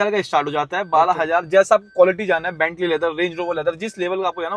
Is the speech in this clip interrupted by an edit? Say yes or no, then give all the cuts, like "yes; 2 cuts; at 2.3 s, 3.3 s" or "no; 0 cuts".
no; 0 cuts